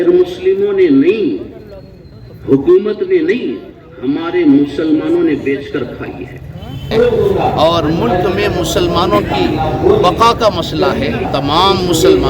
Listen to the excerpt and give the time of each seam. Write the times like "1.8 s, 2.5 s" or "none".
6.9 s, 11.3 s

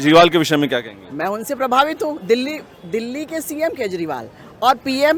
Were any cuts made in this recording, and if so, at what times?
none

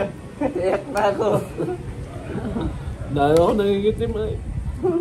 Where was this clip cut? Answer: none

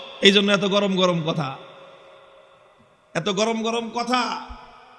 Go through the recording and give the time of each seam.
none

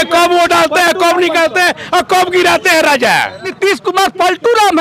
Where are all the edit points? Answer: 3.5 s

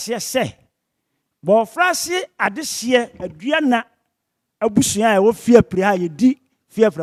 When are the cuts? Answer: none

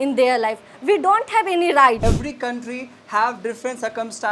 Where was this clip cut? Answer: 2.0 s

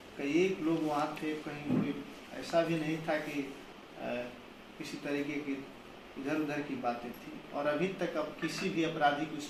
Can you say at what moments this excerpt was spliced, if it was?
none

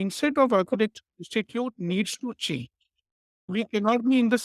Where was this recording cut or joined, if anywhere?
3.5 s

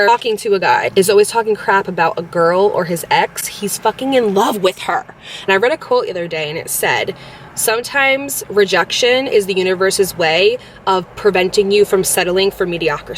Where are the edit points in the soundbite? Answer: 5.5 s

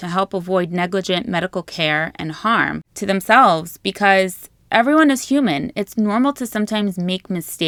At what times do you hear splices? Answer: none

